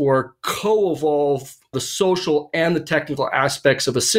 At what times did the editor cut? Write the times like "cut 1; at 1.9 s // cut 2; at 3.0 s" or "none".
cut 1; at 1.7 s